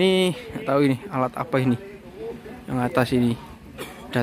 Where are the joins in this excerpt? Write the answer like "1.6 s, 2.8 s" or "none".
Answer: none